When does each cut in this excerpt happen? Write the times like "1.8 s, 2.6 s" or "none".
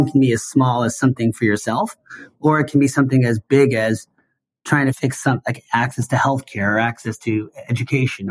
5.0 s